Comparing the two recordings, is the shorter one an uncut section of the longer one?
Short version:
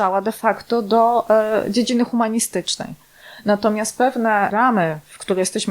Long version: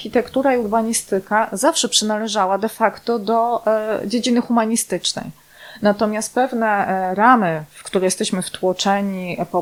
no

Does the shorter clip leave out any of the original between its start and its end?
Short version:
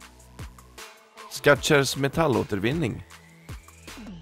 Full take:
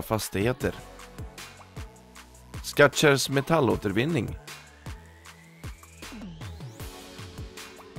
yes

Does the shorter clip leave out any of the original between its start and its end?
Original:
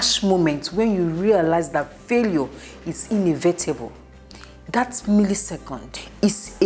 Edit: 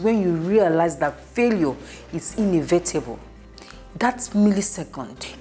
no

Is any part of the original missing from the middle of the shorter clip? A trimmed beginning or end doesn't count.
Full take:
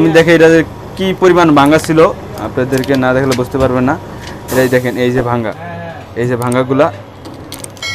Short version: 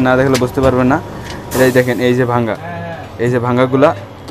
no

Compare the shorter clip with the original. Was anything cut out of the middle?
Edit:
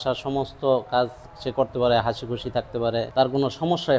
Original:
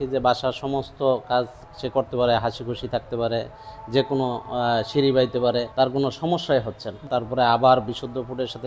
yes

